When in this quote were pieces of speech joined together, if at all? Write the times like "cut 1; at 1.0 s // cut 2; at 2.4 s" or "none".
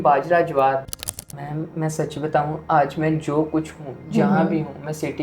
cut 1; at 1.0 s